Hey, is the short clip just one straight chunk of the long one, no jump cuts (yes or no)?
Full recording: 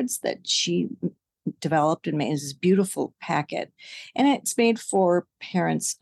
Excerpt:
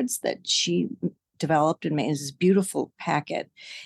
no